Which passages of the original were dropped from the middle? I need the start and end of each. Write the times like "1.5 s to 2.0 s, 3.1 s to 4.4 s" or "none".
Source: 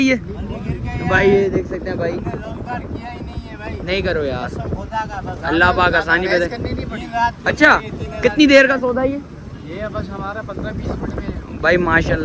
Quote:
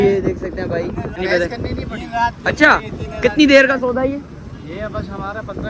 2.5 s to 6.2 s